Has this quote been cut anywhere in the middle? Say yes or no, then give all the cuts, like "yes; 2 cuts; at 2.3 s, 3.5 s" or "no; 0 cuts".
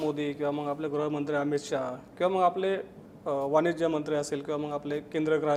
no; 0 cuts